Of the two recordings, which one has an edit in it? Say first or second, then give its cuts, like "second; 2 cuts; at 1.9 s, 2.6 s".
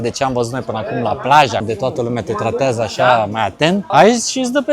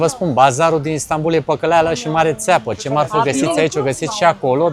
first; 2 cuts; at 1.6 s, 3.9 s